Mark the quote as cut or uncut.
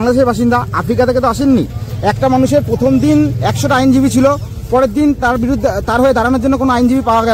uncut